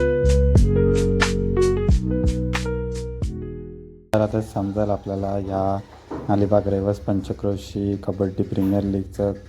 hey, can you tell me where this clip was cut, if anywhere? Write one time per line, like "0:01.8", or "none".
0:04.1